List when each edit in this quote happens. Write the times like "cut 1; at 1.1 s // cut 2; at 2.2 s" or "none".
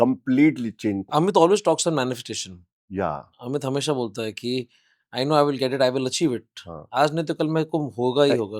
cut 1; at 1.1 s

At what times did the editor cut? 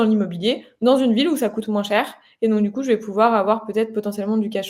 none

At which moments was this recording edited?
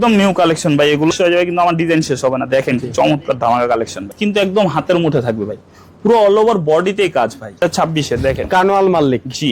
cut 1; at 1.1 s // cut 2; at 4.1 s // cut 3; at 7.6 s

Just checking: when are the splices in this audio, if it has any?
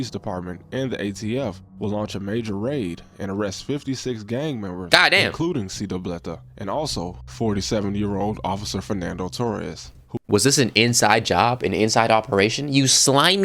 none

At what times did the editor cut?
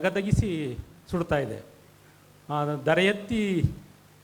none

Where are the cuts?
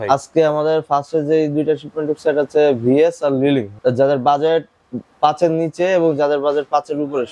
cut 1; at 3.7 s

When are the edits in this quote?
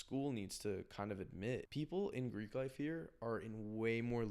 cut 1; at 1.7 s

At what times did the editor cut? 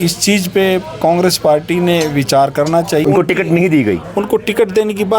cut 1; at 3.0 s

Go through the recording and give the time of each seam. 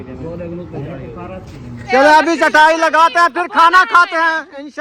cut 1; at 1.9 s

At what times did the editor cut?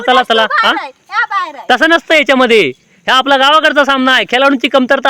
none

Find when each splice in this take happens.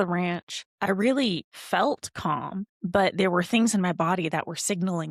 none

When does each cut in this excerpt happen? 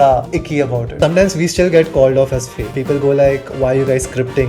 cut 1; at 0.9 s // cut 2; at 2.6 s

